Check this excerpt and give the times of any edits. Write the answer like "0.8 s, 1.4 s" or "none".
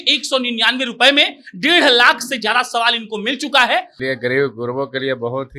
4.0 s